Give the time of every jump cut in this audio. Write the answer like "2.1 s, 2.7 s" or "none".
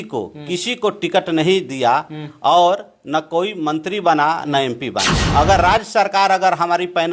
5.3 s